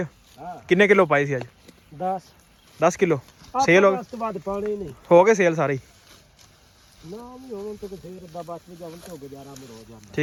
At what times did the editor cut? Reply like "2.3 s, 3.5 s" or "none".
none

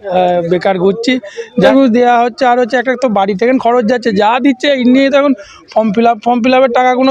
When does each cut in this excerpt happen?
1.7 s

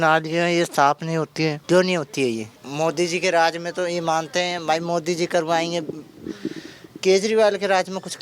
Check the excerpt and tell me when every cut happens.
1.6 s, 2.6 s

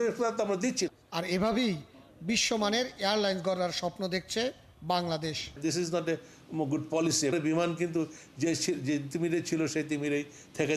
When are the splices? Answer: 1.0 s, 5.6 s, 7.3 s

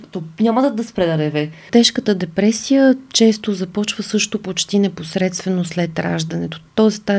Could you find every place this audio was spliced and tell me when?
1.7 s

